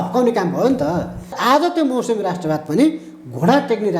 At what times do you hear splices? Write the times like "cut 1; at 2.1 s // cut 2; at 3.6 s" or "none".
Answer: cut 1; at 1.4 s